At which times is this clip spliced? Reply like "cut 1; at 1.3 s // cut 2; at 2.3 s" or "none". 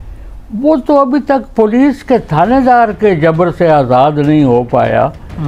none